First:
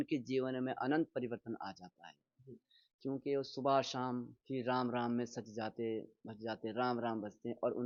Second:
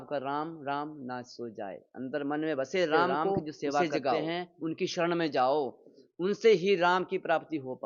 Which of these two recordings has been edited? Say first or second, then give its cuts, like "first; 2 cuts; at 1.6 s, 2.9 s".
second; 1 cut; at 4.1 s